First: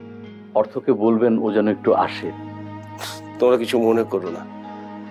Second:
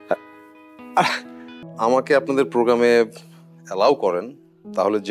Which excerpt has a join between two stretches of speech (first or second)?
second